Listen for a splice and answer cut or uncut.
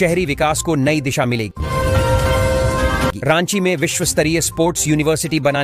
uncut